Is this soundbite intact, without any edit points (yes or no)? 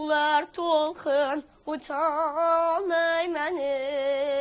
yes